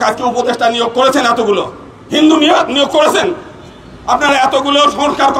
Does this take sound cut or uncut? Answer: uncut